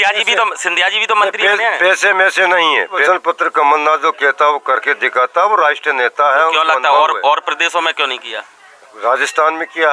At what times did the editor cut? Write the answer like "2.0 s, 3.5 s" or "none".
3.0 s